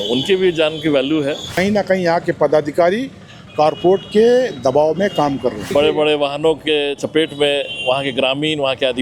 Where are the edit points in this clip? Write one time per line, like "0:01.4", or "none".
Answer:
0:01.5
0:05.7